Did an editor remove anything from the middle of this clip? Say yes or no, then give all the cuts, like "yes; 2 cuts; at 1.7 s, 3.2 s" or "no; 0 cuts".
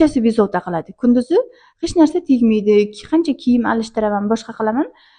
no; 0 cuts